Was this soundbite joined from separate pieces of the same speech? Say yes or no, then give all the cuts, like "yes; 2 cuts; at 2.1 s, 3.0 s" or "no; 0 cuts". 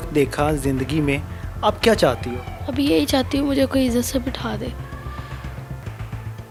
no; 0 cuts